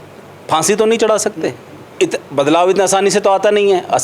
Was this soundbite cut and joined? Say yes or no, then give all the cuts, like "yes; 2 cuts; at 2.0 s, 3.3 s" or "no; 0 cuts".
yes; 1 cut; at 1.9 s